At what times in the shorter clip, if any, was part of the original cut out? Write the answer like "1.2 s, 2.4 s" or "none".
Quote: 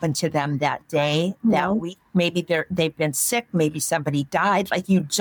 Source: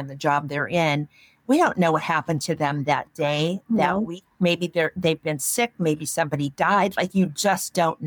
none